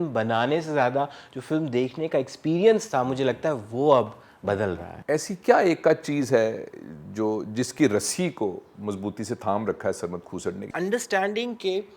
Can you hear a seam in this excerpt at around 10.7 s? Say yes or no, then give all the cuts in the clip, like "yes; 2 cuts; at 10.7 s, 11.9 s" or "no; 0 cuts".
yes; 2 cuts; at 4.9 s, 10.7 s